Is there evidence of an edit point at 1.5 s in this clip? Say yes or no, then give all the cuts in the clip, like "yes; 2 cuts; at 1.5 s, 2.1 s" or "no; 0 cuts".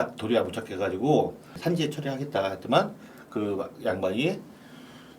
yes; 1 cut; at 1.5 s